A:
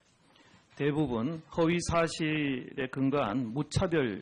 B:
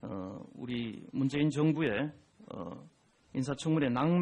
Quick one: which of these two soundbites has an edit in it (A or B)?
B